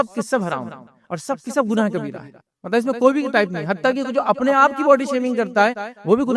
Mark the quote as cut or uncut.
uncut